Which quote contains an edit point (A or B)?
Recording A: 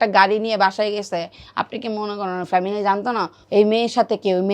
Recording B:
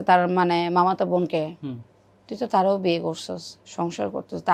A